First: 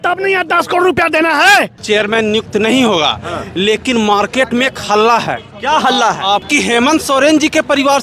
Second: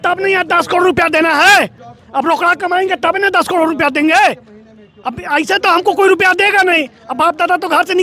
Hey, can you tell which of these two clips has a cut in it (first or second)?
first